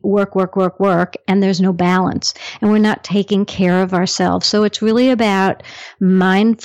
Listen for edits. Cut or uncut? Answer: uncut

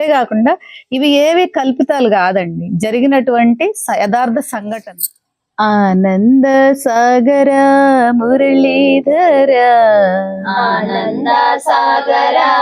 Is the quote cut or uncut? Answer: cut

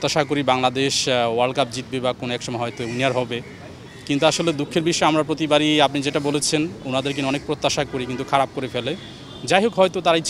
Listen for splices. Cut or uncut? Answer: uncut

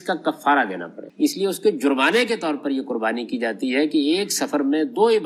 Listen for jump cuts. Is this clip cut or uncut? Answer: cut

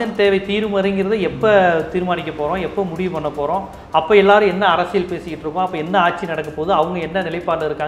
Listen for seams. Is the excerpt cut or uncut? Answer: uncut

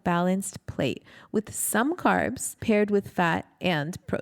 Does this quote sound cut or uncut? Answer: cut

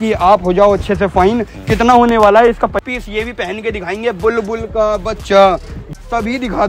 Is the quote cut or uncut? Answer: cut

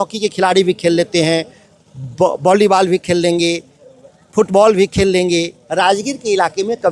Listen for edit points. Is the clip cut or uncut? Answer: cut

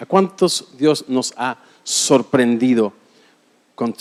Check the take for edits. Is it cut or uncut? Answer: uncut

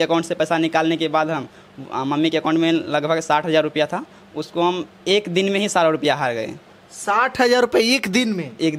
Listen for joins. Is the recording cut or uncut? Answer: uncut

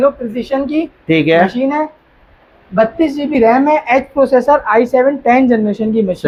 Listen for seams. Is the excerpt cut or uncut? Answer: uncut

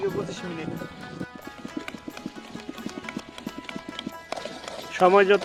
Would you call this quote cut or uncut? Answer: uncut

